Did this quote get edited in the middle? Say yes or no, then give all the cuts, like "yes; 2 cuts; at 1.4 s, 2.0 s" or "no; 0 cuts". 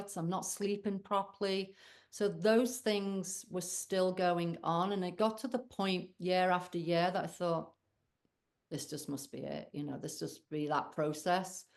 no; 0 cuts